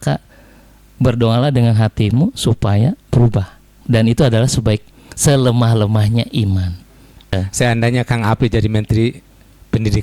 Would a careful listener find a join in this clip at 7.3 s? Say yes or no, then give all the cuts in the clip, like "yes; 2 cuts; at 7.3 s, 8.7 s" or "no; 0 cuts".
yes; 1 cut; at 7.3 s